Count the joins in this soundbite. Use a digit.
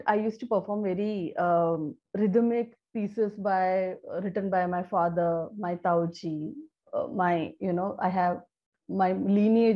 1